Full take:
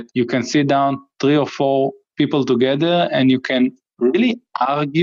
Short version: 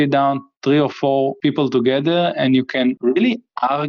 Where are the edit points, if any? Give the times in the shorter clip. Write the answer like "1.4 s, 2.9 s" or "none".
1.3 s, 3.0 s